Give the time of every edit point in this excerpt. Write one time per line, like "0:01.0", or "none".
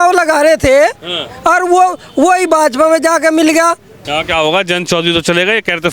0:03.9